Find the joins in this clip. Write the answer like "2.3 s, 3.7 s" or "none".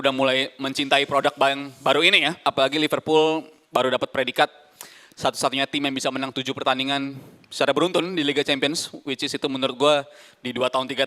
2.4 s